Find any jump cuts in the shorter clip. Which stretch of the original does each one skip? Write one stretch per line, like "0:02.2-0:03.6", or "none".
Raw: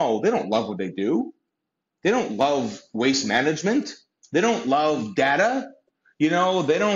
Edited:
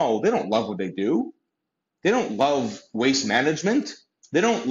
none